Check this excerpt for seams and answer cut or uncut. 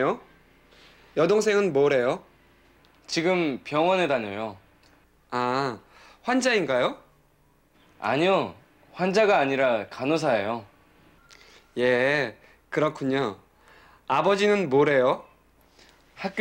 uncut